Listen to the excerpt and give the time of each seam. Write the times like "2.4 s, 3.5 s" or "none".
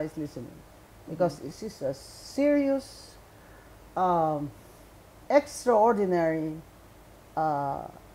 none